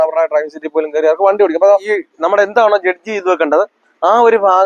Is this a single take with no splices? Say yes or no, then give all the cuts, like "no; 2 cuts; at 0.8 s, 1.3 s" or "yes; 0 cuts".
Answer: no; 1 cut; at 1.9 s